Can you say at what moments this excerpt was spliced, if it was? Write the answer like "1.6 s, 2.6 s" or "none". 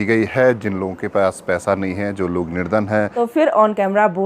3.1 s